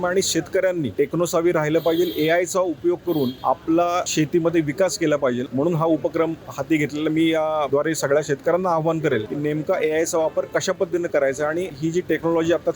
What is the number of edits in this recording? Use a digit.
7